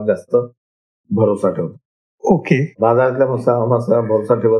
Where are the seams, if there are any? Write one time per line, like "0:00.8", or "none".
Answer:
0:02.7